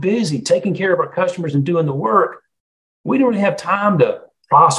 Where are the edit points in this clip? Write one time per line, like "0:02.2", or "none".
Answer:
none